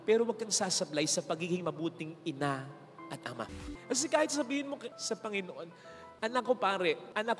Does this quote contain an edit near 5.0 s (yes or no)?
yes